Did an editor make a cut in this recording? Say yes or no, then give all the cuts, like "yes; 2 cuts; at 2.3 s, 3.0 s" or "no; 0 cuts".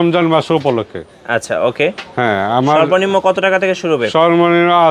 no; 0 cuts